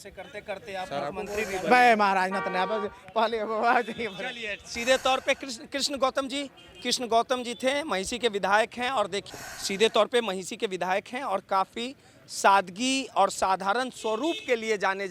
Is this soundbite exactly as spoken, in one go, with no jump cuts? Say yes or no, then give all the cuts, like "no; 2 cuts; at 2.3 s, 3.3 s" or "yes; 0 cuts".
no; 1 cut; at 9.3 s